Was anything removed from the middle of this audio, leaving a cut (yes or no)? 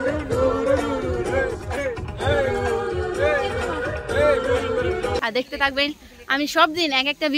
yes